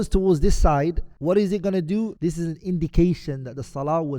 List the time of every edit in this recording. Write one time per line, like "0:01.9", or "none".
0:01.1
0:02.1